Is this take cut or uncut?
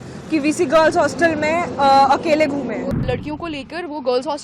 cut